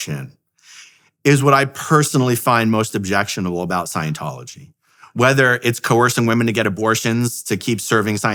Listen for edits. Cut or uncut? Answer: uncut